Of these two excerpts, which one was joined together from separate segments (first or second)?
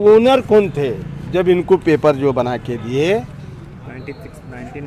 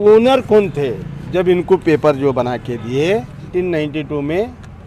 second